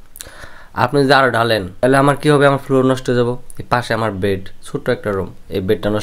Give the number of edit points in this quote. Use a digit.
1